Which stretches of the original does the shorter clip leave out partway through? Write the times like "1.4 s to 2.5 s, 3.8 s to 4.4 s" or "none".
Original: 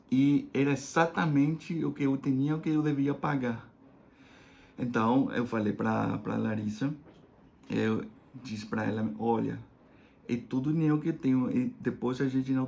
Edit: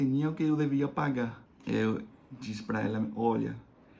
3.7 s to 7.5 s